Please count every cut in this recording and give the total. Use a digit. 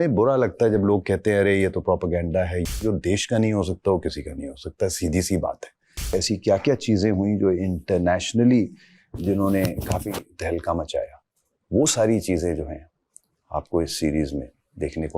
2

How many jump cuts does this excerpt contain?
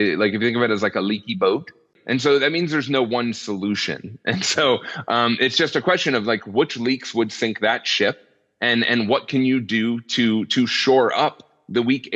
1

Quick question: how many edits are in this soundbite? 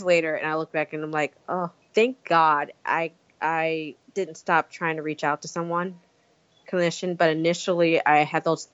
2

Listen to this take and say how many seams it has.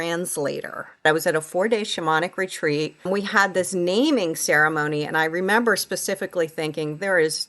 2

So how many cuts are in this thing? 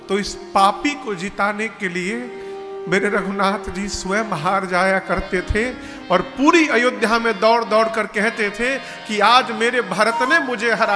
0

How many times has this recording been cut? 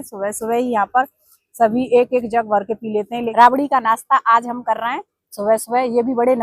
1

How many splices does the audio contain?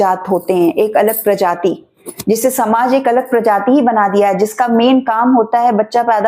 0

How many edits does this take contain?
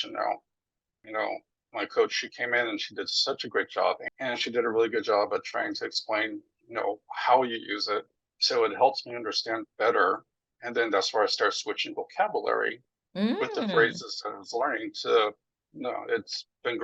3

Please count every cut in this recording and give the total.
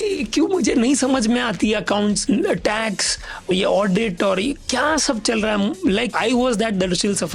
3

